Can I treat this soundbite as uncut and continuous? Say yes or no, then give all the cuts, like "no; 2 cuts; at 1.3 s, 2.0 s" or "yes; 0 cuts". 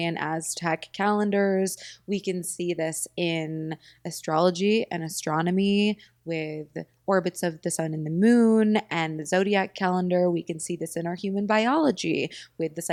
yes; 0 cuts